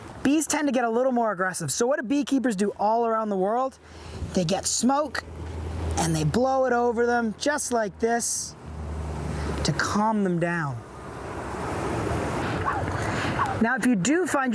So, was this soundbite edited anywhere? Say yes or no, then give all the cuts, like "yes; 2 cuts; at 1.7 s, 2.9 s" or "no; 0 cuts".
no; 0 cuts